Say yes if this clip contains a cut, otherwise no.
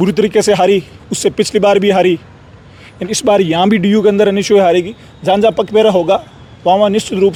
no